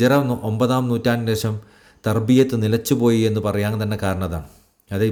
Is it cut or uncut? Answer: uncut